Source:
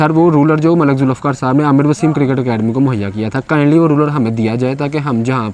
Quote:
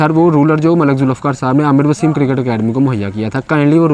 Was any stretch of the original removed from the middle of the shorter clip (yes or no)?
no